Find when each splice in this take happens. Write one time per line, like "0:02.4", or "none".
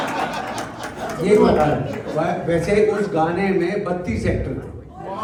none